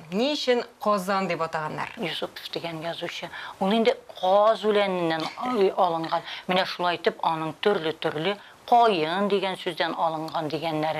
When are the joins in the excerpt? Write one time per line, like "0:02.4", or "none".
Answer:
0:01.9

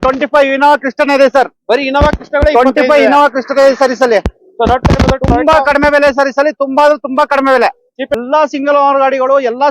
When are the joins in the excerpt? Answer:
0:08.2

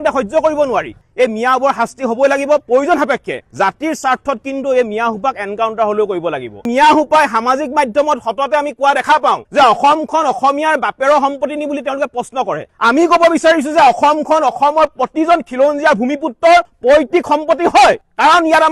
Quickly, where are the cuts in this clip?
0:01.1
0:06.7

